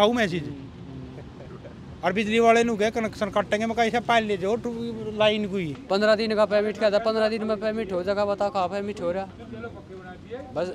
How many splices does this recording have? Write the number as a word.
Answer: one